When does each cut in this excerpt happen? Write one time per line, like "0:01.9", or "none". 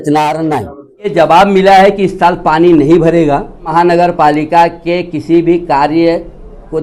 0:01.1
0:03.7